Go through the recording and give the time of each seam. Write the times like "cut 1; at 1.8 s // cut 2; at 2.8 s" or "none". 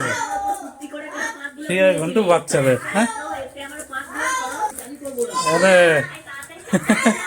cut 1; at 4.7 s

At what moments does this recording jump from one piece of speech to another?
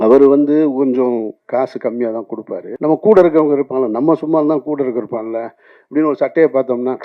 cut 1; at 2.6 s

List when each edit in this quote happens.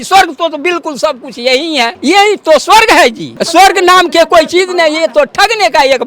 cut 1; at 1.9 s // cut 2; at 3.3 s

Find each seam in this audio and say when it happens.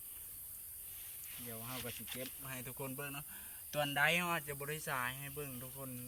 none

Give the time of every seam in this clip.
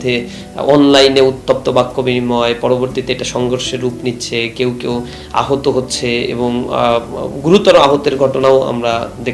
none

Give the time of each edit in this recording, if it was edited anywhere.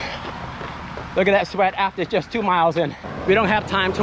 cut 1; at 3.1 s

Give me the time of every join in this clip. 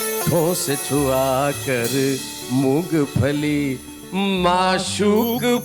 none

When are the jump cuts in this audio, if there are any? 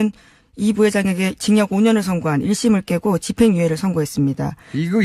cut 1; at 3.0 s

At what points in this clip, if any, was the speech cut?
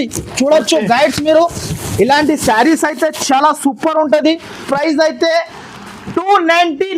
cut 1; at 4.7 s

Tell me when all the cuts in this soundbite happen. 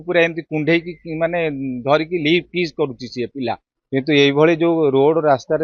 cut 1; at 3.7 s

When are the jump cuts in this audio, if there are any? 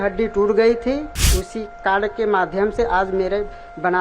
cut 1; at 1.2 s

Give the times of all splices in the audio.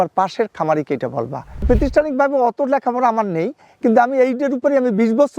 cut 1; at 1.5 s

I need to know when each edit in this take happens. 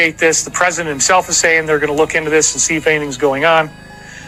none

